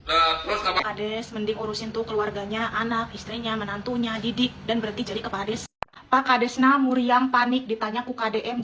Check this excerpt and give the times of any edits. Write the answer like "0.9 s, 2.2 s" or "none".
0.8 s, 5.6 s